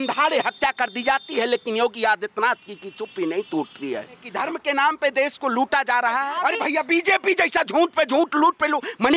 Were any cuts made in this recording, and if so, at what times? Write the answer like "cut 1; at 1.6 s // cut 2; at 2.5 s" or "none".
cut 1; at 4.3 s // cut 2; at 6.3 s